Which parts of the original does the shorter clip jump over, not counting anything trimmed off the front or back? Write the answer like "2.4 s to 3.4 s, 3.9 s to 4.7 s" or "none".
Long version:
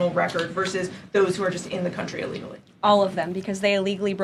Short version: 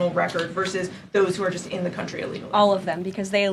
2.4 s to 2.7 s